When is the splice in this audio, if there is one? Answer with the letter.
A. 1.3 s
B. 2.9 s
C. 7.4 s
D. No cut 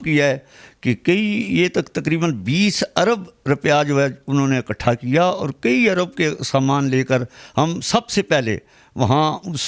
D